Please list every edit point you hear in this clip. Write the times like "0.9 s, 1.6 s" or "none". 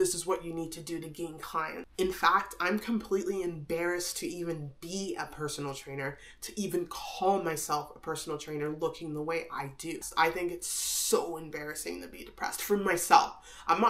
1.8 s, 10.1 s